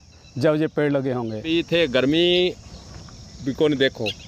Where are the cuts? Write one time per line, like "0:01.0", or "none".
0:01.4